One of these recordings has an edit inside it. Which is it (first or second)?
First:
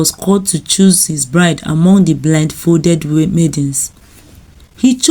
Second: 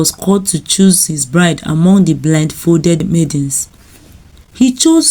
second